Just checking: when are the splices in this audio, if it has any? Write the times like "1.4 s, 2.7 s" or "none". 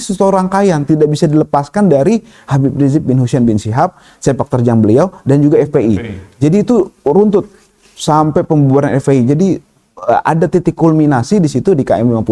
none

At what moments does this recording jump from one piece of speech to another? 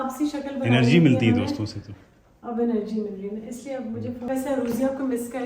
4.3 s

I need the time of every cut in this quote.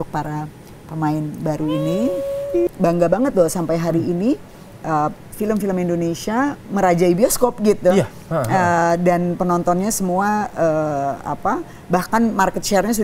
2.7 s

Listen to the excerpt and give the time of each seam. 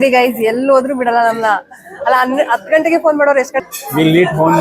3.6 s

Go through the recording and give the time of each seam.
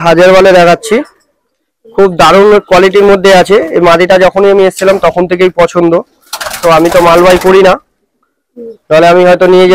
none

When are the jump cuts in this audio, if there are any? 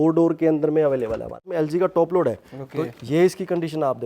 1.5 s

